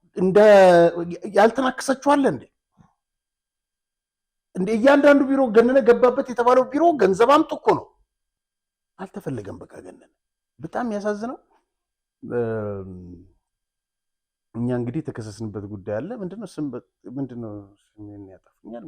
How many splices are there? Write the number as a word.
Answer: zero